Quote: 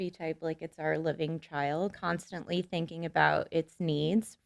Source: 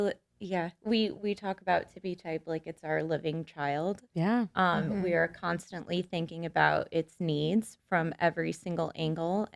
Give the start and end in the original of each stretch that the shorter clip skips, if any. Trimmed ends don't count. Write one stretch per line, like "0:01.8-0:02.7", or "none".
0:04.0-0:05.4